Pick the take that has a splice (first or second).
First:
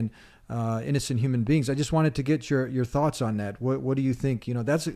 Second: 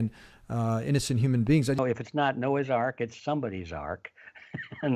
second